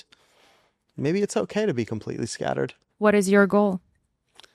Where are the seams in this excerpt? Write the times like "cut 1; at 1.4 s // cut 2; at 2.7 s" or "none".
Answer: cut 1; at 2.8 s